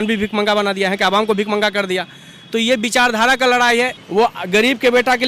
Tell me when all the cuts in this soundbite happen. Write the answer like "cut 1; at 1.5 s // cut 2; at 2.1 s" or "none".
none